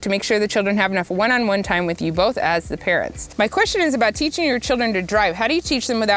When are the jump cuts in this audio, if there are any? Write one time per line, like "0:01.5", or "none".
0:03.2